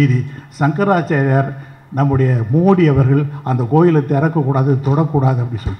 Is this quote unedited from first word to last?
yes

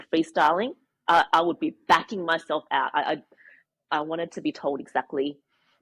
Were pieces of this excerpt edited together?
no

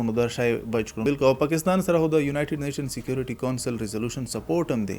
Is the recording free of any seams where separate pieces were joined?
no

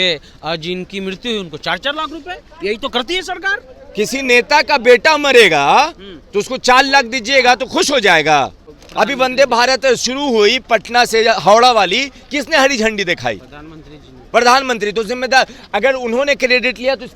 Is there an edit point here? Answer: yes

